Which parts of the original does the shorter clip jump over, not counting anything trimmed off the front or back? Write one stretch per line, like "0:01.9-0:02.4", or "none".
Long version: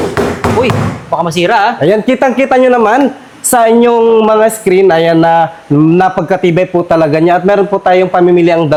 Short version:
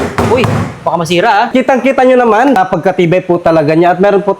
0:01.8-0:02.0
0:03.1-0:06.0